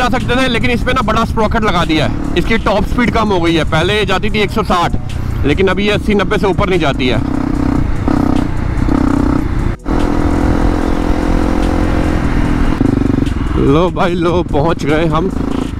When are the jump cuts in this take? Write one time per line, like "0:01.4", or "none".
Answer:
none

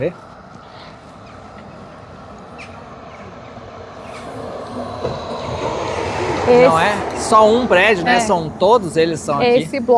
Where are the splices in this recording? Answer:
none

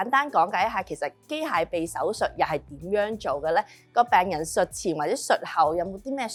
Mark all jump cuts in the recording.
none

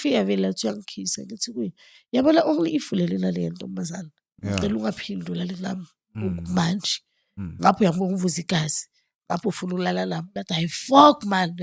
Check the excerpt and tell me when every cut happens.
0:10.4

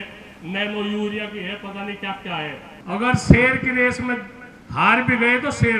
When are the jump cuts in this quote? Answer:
0:02.7

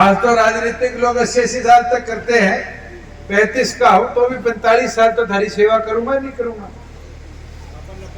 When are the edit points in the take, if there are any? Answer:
none

